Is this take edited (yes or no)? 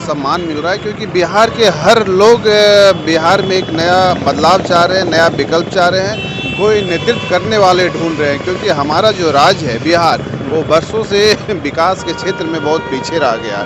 no